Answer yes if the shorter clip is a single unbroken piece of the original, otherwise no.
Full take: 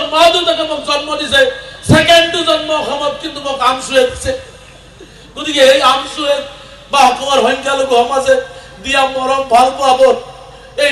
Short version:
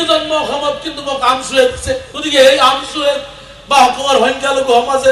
no